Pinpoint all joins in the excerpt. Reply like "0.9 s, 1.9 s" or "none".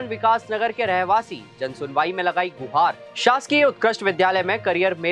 3.0 s